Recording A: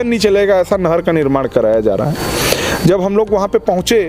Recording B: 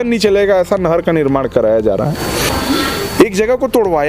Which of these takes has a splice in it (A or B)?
B